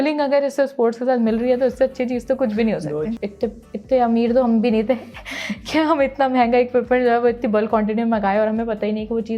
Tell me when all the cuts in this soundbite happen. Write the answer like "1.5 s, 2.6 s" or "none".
3.1 s